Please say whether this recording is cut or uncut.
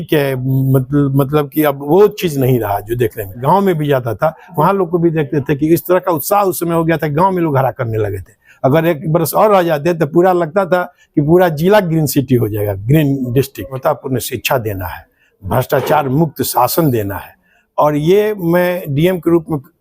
cut